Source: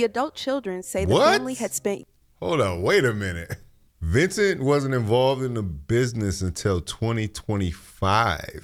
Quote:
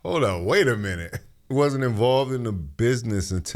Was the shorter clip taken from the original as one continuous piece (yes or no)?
no